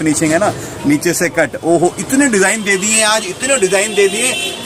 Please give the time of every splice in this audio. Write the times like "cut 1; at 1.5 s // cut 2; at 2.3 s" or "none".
none